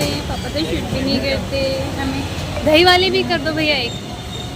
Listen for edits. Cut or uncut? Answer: uncut